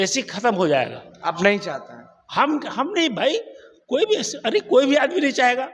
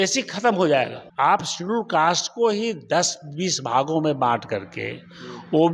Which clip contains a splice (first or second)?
second